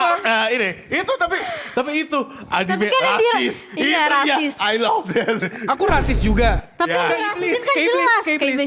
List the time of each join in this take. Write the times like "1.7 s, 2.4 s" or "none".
none

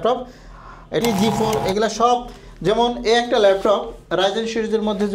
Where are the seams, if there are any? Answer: 1.0 s

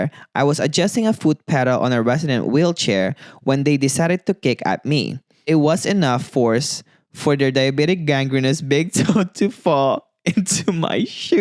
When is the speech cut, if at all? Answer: 5.5 s

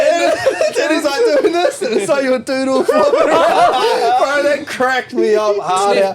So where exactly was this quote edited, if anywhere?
none

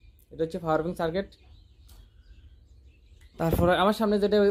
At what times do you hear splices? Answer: none

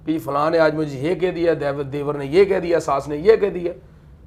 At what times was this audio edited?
none

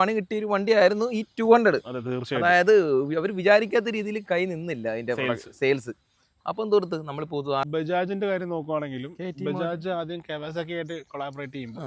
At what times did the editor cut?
7.6 s

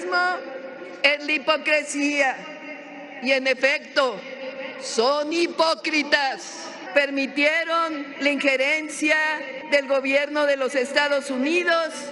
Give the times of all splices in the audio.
6.8 s, 8.1 s, 9.5 s

